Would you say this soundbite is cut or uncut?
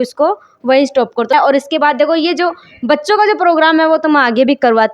cut